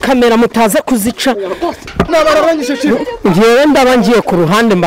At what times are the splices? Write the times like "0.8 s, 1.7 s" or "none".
2.1 s